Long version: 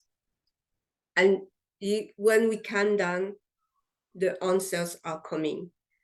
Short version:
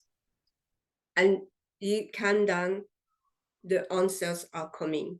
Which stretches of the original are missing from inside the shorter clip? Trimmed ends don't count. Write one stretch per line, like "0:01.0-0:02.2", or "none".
0:02.1-0:02.6